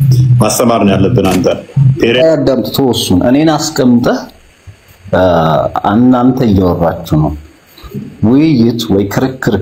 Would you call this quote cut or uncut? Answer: cut